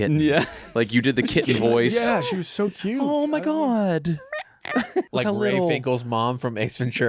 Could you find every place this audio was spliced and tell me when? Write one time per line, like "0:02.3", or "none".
0:05.1